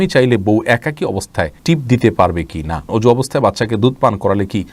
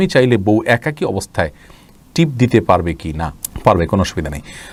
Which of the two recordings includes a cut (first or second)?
first